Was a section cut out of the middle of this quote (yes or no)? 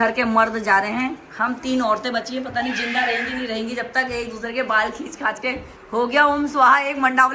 no